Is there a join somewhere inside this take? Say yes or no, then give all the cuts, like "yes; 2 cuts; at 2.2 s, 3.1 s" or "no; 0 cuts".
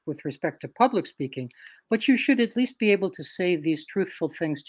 no; 0 cuts